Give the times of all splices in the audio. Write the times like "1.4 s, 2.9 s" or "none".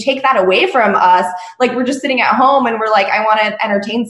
none